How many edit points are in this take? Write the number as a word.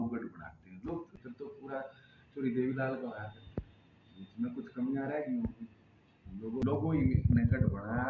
two